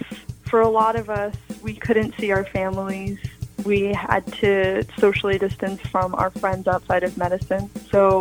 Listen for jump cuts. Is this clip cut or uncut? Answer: uncut